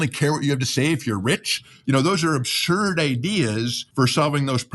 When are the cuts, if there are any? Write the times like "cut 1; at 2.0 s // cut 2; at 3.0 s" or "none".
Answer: cut 1; at 3.8 s

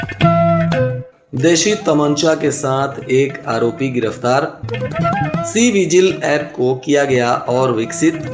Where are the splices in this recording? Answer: cut 1; at 1.1 s

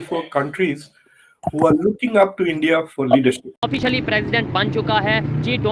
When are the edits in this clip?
cut 1; at 3.5 s

